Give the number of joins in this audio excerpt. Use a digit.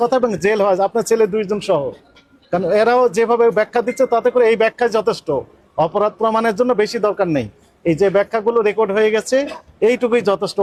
0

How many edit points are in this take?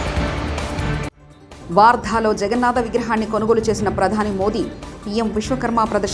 1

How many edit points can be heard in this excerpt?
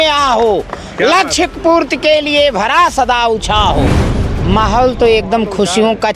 1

